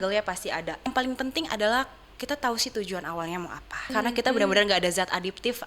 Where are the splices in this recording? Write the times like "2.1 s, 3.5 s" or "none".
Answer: 0.9 s, 3.9 s